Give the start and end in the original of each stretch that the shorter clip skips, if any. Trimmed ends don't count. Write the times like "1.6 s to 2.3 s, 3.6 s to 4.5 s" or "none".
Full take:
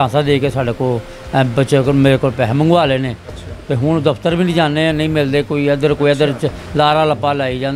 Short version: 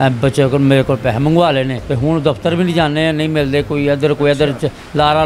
3.2 s to 3.6 s